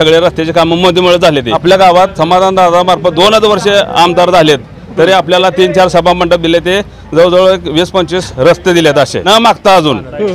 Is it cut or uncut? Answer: cut